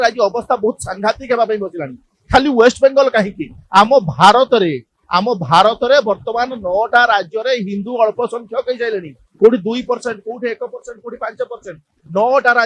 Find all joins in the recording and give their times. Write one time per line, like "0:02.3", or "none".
none